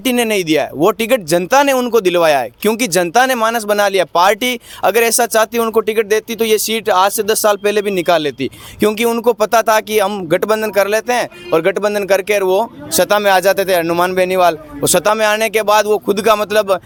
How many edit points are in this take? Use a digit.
0